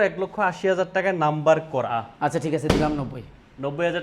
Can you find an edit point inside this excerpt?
yes; 1 cut; at 1.9 s

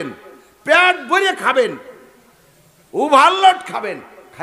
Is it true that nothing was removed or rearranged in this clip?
yes; 0 cuts

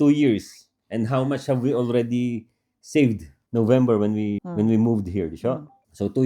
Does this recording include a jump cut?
no; 0 cuts

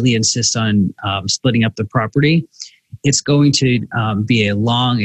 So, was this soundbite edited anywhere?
no; 0 cuts

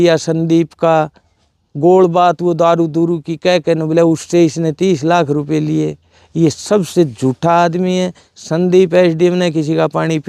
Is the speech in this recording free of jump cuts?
yes; 0 cuts

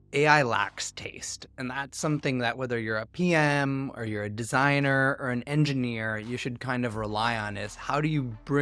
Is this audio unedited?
yes; 0 cuts

